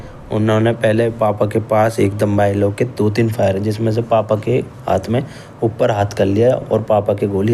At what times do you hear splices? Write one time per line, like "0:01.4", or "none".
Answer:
none